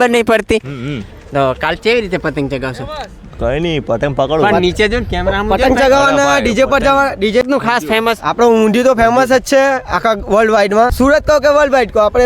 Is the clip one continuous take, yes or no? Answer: no